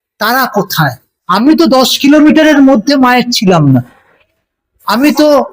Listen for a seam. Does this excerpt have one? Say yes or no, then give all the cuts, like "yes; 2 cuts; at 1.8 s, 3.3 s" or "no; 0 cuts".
yes; 1 cut; at 1.1 s